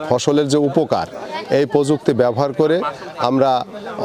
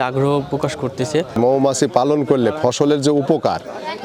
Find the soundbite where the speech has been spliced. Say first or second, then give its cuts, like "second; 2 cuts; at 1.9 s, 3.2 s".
second; 1 cut; at 1.3 s